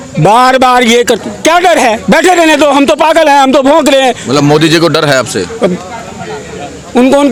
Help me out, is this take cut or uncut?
uncut